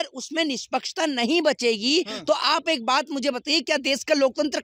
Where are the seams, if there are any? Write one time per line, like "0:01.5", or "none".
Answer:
none

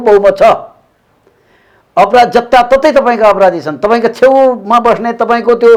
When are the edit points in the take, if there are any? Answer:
none

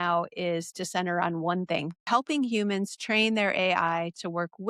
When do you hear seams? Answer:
0:02.0

